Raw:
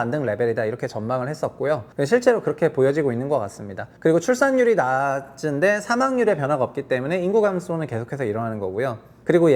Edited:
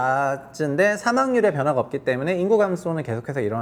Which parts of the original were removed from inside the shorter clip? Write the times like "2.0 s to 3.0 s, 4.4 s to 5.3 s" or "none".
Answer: none